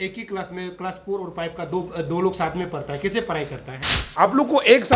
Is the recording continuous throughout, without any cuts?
no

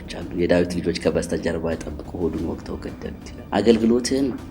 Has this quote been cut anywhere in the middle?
yes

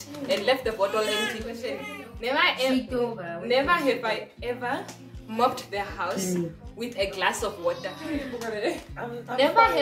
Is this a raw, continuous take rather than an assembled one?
no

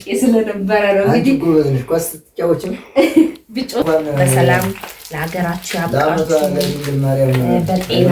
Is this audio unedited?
no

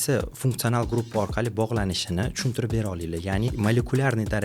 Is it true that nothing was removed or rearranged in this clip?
no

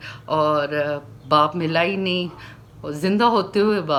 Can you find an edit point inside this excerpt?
no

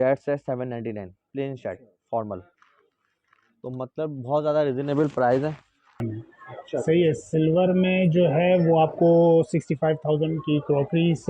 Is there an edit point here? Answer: yes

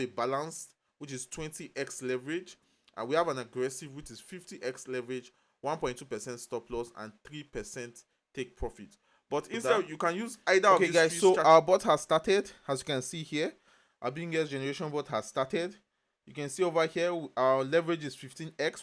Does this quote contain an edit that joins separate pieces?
yes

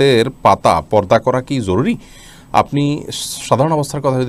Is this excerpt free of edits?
yes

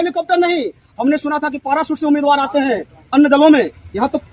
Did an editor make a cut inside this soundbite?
no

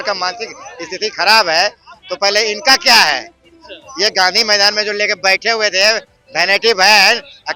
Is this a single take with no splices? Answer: yes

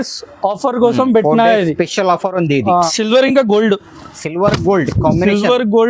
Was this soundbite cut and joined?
yes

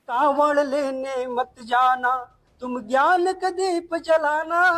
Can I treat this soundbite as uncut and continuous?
yes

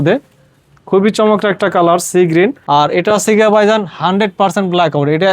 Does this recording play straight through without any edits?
no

